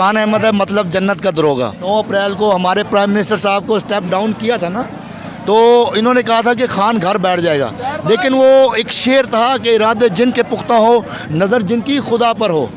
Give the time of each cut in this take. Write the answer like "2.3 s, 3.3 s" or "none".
1.8 s